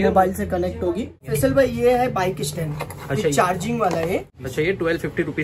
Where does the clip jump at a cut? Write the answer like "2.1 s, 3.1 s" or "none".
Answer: 1.2 s, 4.4 s